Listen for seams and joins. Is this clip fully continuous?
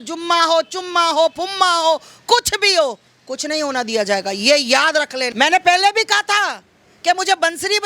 no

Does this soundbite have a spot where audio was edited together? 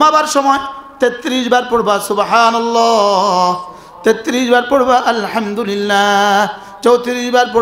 no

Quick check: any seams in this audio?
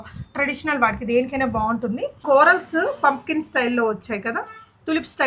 yes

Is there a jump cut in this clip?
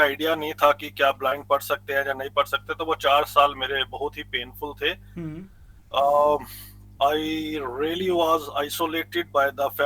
no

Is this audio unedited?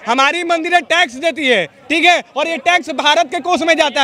yes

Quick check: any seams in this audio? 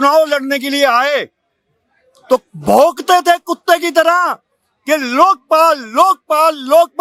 no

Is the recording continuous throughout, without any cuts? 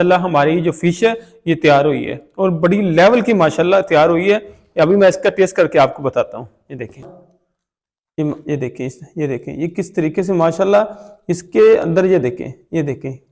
yes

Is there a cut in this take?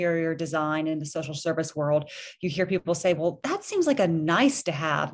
yes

